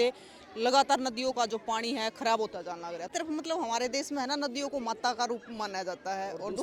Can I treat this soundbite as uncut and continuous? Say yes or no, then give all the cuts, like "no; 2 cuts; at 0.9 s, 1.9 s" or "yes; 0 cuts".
no; 1 cut; at 3.1 s